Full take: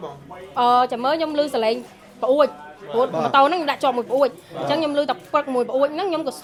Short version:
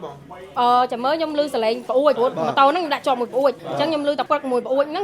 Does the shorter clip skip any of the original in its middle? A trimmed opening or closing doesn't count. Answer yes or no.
yes